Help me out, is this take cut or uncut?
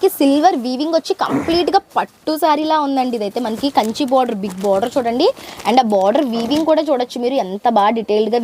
uncut